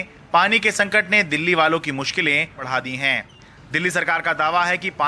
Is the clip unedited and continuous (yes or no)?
no